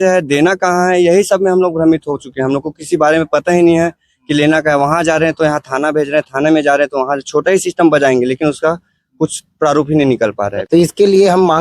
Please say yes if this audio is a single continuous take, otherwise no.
no